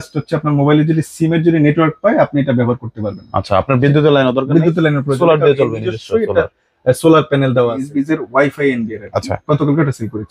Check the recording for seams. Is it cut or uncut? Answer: cut